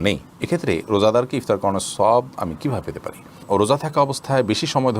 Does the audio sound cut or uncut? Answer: cut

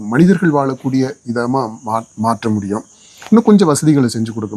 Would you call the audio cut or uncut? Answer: uncut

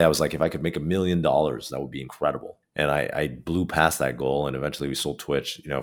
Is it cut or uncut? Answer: cut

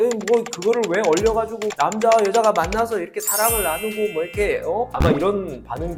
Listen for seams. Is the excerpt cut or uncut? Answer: uncut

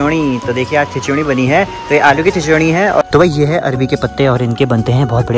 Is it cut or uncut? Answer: cut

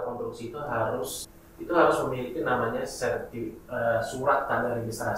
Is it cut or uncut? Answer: cut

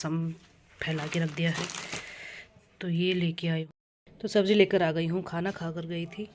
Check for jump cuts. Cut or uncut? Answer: cut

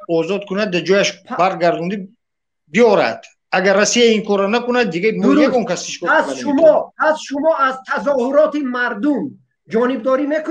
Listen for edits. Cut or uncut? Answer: uncut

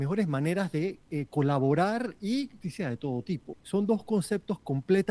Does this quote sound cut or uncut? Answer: cut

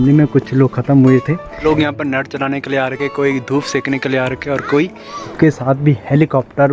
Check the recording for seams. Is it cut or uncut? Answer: cut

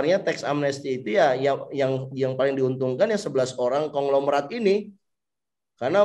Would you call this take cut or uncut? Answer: uncut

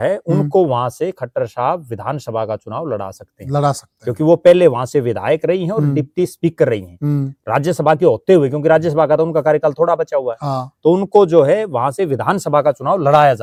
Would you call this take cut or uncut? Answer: uncut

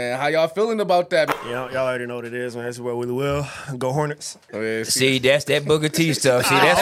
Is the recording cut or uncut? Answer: cut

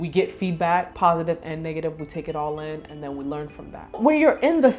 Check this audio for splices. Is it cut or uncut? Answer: cut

